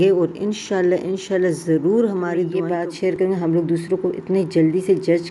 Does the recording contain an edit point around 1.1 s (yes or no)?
no